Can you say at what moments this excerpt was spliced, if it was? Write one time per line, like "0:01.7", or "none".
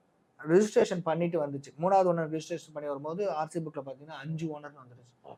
none